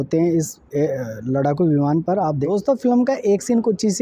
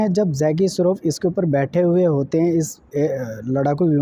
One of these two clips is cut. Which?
first; 1 cut; at 2.7 s

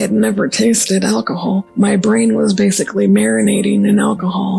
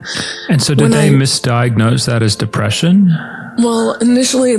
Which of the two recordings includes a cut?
first; 1 cut; at 1.7 s

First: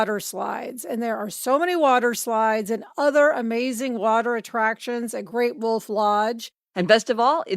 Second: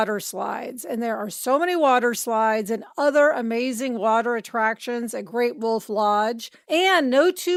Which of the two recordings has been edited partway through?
first; 1 cut; at 6.5 s

